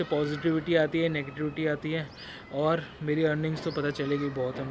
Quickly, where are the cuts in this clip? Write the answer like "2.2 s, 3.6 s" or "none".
none